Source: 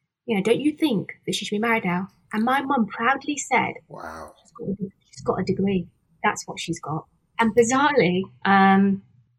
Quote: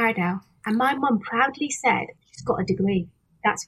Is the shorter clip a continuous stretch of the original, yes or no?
no